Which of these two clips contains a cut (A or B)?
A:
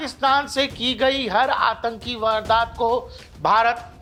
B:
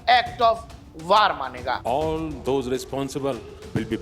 B